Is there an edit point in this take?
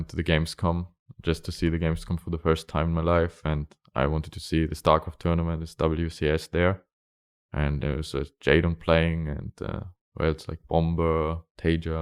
no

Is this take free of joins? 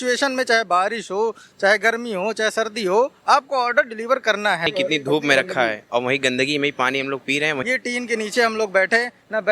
no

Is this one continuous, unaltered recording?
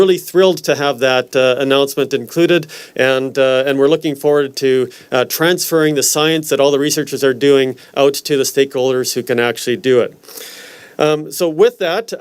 yes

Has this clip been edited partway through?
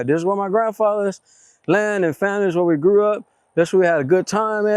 yes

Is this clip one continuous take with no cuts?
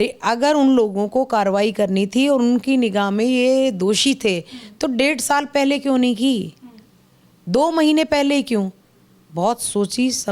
yes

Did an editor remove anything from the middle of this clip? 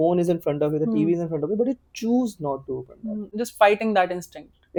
no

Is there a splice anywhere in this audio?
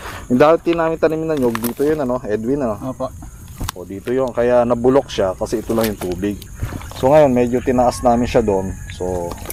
no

